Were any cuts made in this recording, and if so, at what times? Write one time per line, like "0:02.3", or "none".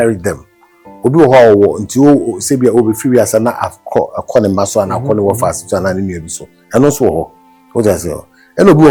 none